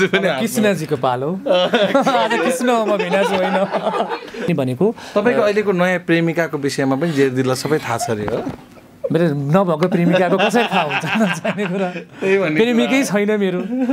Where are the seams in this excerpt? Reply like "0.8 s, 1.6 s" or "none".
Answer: 4.5 s

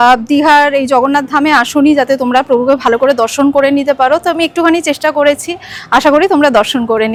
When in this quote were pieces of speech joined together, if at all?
none

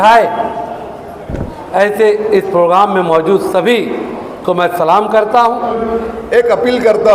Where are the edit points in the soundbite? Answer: 5.8 s

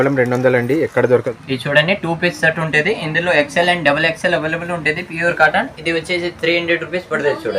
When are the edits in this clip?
1.3 s

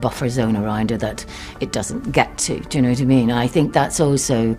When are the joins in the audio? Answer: none

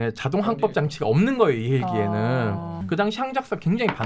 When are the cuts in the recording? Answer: 2.8 s

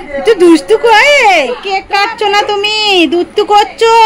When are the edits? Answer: 1.7 s

